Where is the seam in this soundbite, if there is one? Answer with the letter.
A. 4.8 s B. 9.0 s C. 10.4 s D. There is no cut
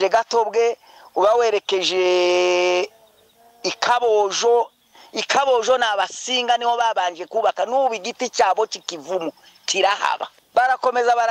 C